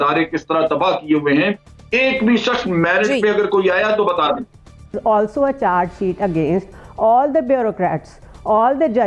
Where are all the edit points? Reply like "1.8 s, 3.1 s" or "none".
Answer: 5.0 s